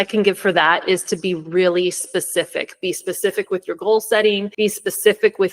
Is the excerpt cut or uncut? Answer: cut